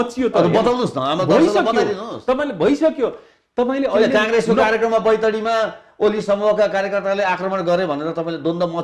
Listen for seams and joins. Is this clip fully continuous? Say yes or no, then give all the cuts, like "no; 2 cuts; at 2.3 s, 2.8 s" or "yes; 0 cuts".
yes; 0 cuts